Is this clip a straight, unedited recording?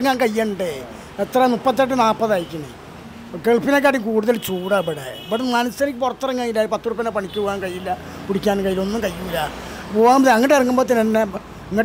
yes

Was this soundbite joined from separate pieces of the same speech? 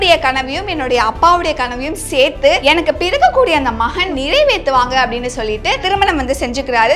yes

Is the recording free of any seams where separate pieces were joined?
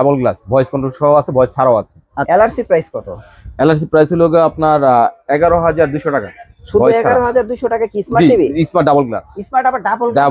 no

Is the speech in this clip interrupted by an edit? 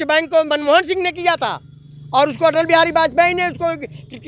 no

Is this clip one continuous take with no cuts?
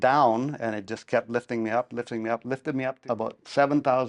no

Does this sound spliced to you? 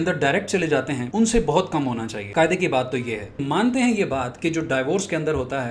yes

